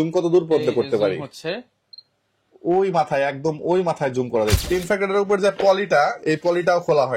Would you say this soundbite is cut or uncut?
cut